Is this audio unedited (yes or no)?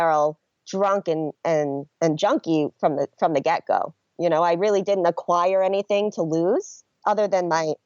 no